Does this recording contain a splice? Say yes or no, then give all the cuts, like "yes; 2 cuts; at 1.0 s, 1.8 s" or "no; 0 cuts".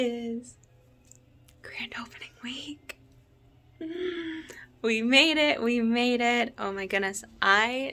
no; 0 cuts